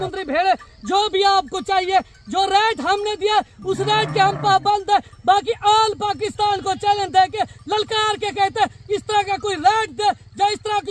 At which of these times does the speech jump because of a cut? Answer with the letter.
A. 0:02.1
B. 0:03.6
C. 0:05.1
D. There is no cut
D